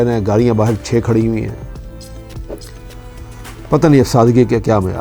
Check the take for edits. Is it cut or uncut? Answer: cut